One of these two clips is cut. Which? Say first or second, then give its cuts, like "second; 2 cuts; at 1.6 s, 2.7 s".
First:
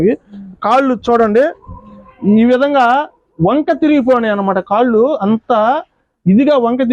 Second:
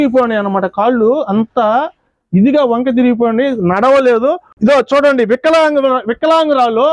second; 1 cut; at 4.5 s